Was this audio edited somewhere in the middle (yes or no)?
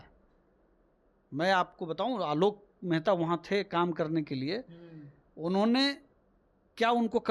no